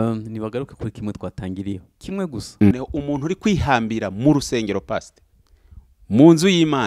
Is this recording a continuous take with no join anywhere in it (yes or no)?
no